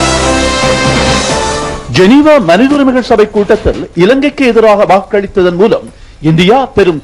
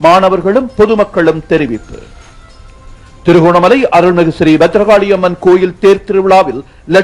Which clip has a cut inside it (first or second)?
first